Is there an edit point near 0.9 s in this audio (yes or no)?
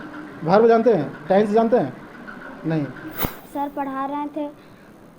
no